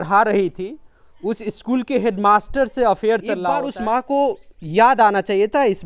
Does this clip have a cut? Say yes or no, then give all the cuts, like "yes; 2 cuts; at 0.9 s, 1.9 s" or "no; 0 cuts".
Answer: yes; 1 cut; at 3.5 s